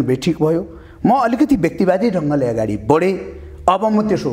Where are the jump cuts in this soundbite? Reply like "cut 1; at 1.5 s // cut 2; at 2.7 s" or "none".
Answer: none